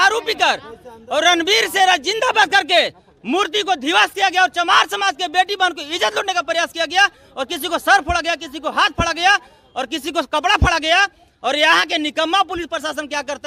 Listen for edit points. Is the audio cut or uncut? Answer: uncut